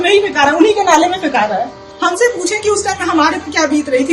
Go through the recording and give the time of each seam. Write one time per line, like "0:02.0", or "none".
0:01.8

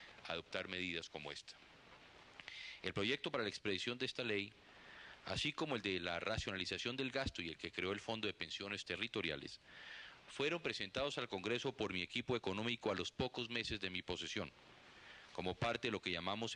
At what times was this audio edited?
none

